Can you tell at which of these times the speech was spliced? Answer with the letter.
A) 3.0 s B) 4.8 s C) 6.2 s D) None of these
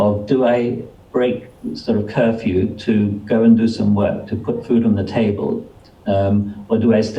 D